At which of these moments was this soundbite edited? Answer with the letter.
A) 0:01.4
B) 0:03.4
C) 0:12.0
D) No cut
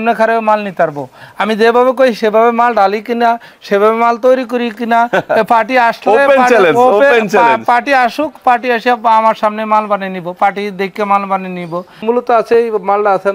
C